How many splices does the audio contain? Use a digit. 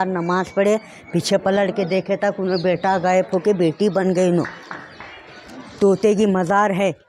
0